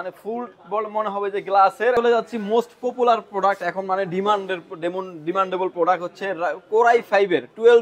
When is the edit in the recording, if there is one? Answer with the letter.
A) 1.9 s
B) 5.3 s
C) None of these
A